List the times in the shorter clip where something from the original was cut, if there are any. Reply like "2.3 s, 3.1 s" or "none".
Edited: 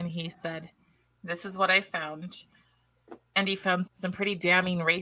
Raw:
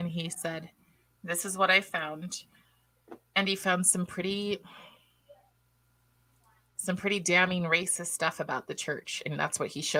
3.9 s